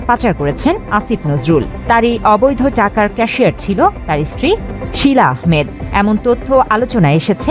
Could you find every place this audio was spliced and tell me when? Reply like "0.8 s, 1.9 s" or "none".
none